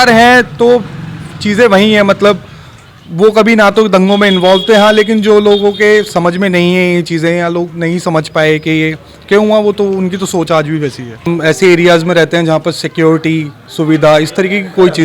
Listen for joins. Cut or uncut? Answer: cut